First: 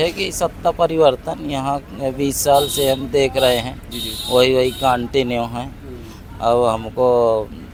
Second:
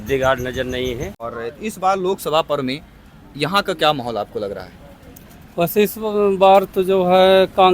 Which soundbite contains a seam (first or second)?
second